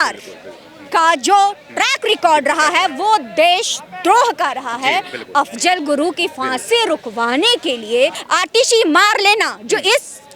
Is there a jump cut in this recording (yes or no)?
yes